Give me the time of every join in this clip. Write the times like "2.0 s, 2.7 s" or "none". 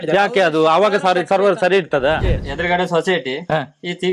2.5 s